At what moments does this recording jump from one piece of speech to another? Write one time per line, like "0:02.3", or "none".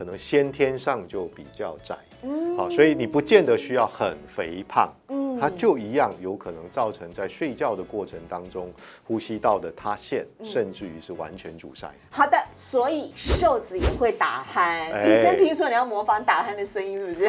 none

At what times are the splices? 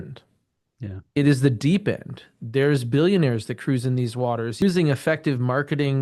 0:04.6

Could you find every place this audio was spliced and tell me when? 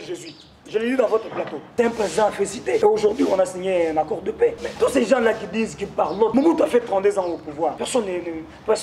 0:01.7
0:02.8
0:04.6
0:06.3
0:07.8

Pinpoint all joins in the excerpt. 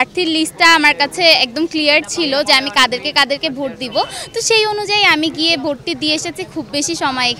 none

